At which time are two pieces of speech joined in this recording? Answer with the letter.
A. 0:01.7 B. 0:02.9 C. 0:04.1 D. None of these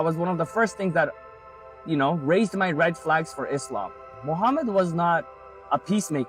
C